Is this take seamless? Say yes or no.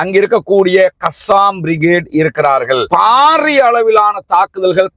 no